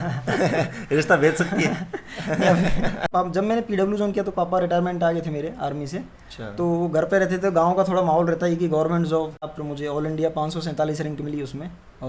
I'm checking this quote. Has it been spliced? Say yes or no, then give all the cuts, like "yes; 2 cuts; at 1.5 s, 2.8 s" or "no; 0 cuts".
yes; 2 cuts; at 3.1 s, 9.5 s